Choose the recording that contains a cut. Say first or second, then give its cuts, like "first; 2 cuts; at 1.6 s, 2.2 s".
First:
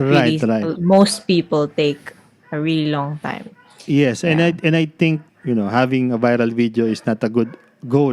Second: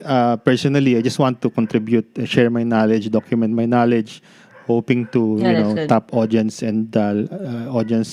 first; 1 cut; at 5.3 s